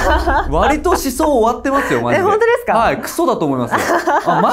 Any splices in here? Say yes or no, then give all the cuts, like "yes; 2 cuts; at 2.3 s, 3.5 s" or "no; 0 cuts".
no; 0 cuts